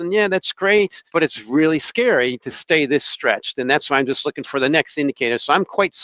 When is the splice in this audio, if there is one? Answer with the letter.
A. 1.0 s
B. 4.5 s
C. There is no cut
A